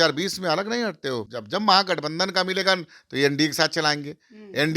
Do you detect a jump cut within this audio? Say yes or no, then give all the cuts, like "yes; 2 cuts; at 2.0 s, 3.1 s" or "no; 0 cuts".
yes; 1 cut; at 1.3 s